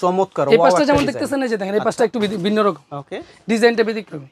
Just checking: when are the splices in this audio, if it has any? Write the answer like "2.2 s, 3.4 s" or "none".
none